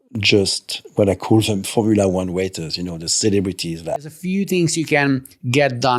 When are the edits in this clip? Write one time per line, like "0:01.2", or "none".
0:04.2